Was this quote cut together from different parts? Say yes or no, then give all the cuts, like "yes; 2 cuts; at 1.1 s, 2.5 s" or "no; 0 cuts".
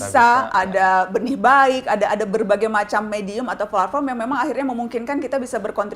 no; 0 cuts